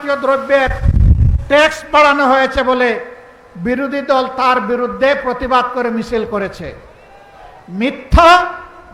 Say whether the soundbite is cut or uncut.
uncut